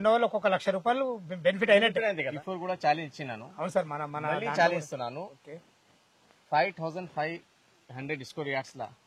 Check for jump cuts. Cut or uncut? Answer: cut